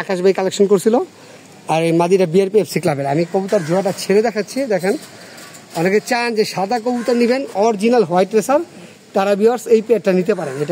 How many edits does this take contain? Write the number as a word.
zero